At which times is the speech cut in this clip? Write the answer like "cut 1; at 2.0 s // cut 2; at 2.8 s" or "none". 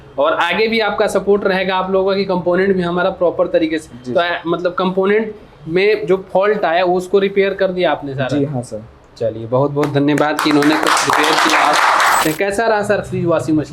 cut 1; at 12.2 s